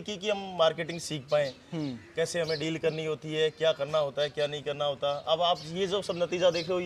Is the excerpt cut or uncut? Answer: uncut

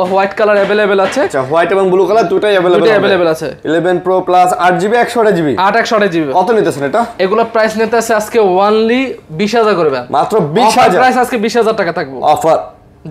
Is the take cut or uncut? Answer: uncut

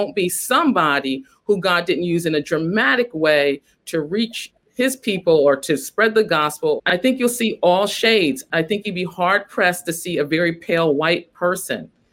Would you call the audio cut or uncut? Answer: cut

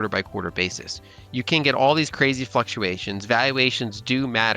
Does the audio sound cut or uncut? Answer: uncut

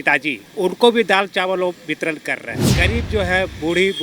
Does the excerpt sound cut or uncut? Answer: uncut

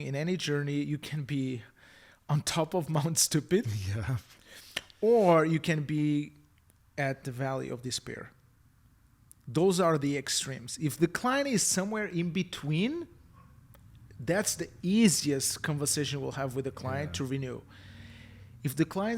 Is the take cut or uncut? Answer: uncut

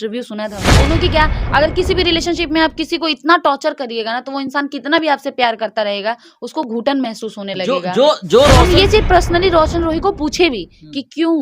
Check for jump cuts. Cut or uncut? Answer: cut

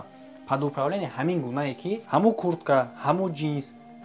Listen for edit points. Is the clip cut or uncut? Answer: cut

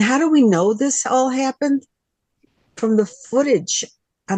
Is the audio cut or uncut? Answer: uncut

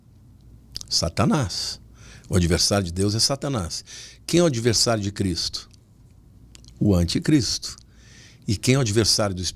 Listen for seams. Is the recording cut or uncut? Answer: uncut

